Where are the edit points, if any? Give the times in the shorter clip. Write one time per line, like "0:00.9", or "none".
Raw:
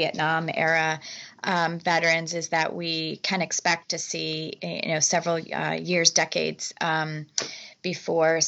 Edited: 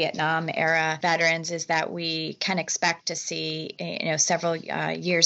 0:01.0